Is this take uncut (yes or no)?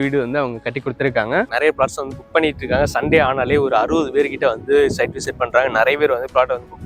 no